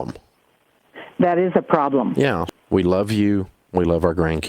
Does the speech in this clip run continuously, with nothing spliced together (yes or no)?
no